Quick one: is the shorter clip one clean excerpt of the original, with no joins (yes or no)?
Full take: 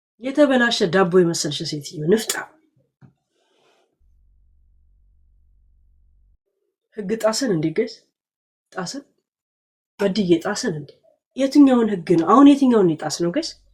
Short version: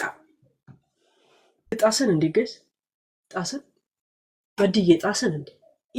no